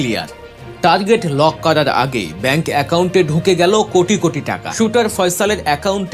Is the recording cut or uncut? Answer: cut